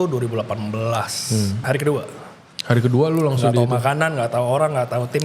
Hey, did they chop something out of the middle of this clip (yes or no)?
yes